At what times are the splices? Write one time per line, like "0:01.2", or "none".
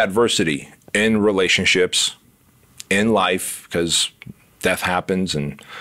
none